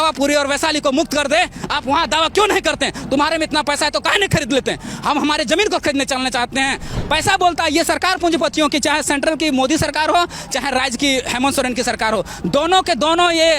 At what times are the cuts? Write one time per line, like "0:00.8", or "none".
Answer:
0:06.9